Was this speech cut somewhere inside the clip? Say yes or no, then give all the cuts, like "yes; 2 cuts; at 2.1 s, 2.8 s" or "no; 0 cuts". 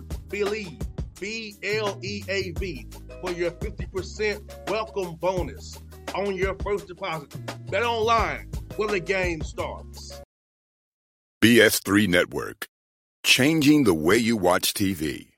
yes; 1 cut; at 10.1 s